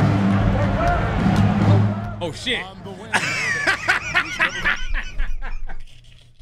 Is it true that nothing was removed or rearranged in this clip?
yes; 0 cuts

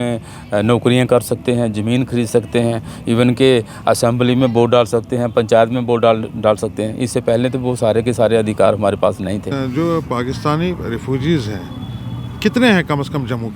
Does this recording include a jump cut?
yes; 1 cut; at 9.5 s

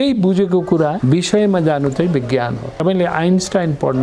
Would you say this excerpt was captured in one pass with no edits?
no; 2 cuts; at 1.0 s, 2.8 s

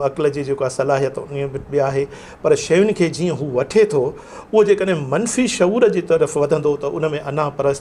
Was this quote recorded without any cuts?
yes; 0 cuts

